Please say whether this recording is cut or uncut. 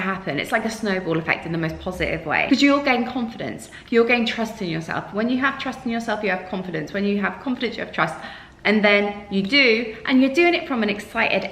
cut